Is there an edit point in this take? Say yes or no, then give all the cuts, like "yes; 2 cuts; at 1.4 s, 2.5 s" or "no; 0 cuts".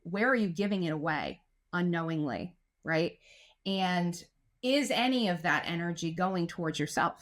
no; 0 cuts